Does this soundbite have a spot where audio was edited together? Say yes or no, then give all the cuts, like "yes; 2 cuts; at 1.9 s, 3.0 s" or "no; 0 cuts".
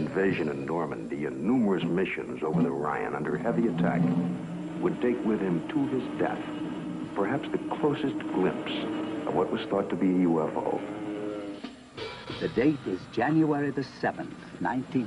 yes; 1 cut; at 6.4 s